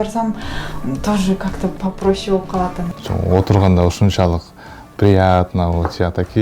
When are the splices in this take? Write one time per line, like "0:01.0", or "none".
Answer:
0:02.9